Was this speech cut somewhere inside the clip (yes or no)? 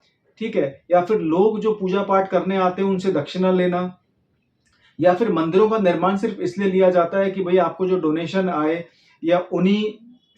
no